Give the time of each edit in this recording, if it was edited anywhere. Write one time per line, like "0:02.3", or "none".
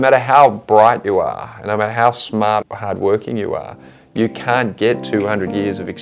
0:02.6